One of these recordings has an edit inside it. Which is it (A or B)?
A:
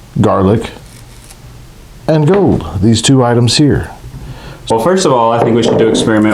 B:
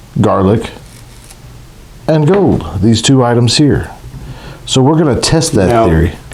A